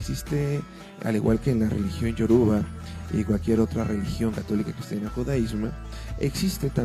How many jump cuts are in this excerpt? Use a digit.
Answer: 1